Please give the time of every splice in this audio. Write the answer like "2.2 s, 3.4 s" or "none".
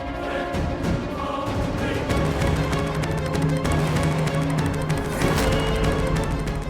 none

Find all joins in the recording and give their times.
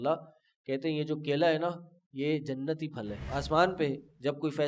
3.2 s

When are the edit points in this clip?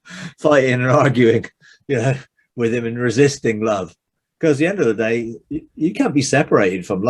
none

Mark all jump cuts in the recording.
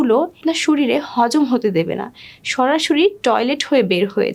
none

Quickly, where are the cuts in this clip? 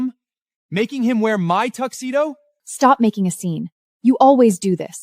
2.6 s

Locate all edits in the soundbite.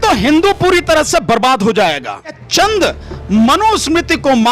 2.4 s

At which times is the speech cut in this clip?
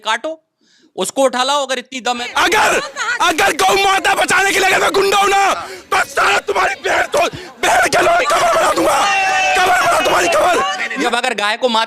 2.2 s, 11.0 s

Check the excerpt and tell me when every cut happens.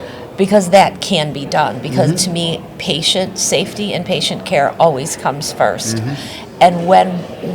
none

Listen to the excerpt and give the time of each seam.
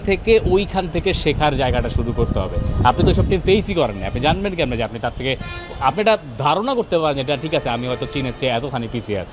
none

